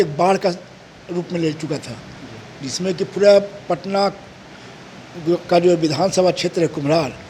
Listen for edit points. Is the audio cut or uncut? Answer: uncut